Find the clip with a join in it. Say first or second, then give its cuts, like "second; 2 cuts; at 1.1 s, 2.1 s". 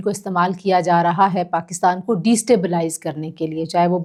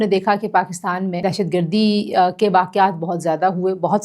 second; 1 cut; at 1.2 s